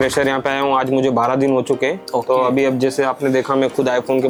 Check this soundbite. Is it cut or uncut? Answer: uncut